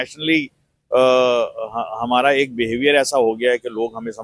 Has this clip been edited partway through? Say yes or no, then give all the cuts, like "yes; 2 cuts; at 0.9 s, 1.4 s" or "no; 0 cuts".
no; 0 cuts